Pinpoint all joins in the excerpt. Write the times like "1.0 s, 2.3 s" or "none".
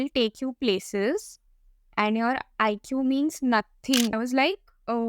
4.1 s